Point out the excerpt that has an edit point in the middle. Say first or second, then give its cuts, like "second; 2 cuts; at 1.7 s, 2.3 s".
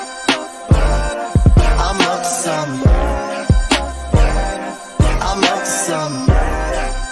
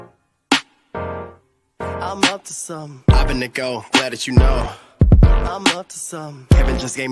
second; 1 cut; at 2.0 s